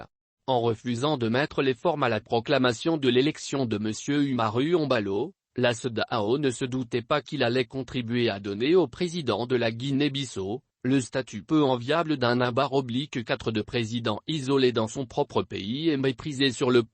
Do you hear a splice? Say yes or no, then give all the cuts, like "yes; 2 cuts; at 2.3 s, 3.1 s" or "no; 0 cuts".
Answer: no; 0 cuts